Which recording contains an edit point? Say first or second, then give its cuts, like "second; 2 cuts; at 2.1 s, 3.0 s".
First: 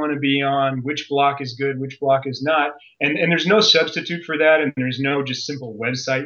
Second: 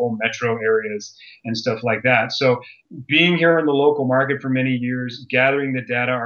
second; 1 cut; at 2.8 s